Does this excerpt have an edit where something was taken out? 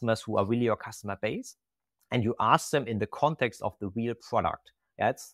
no; 0 cuts

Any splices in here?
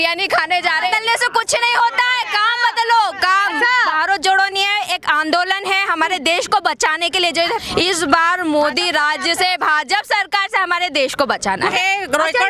yes; 4 cuts; at 0.9 s, 4.0 s, 7.6 s, 11.6 s

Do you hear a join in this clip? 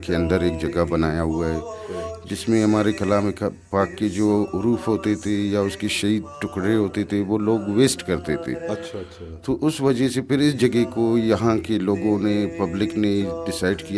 no; 0 cuts

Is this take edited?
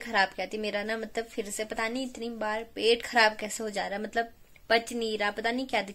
no; 0 cuts

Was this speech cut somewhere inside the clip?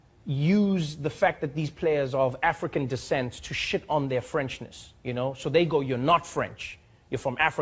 no; 0 cuts

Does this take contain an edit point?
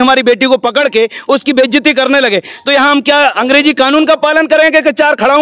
no; 0 cuts

